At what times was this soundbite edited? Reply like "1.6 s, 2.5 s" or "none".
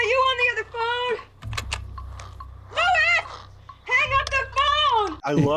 none